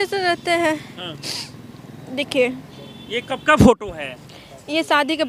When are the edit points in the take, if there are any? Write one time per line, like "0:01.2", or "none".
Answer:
none